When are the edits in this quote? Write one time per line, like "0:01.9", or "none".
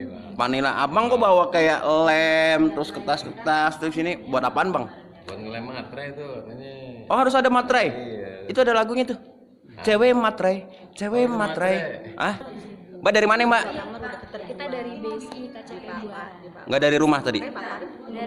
0:12.5

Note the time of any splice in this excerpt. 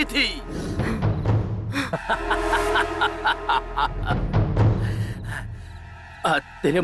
0:01.9

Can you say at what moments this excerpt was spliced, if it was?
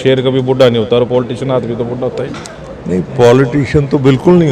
none

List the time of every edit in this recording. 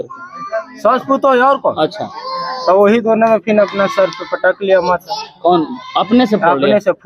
none

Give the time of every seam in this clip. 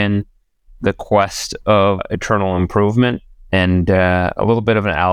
0:02.0

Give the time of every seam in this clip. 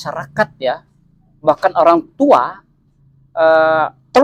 none

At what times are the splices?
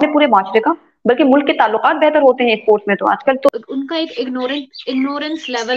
0:03.5

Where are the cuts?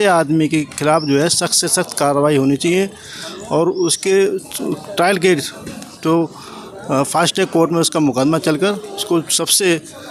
none

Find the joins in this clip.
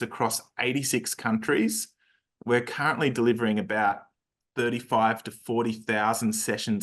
none

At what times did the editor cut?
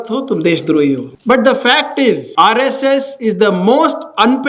0:01.1
0:02.3

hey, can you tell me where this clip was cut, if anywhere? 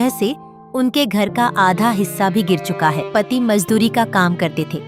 0:03.1

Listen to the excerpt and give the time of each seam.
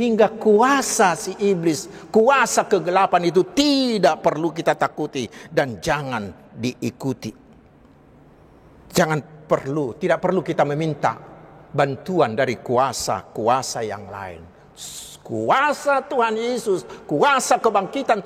none

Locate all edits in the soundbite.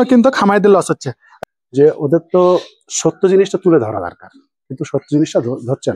0:01.2

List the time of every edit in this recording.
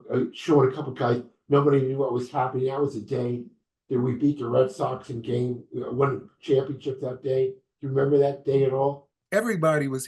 0:09.2

